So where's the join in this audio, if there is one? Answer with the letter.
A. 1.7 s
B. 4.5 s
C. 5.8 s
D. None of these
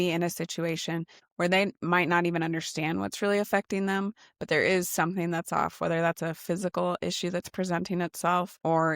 D